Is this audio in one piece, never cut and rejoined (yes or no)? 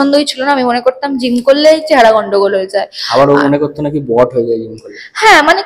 yes